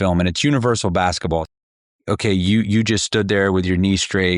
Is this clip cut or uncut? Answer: cut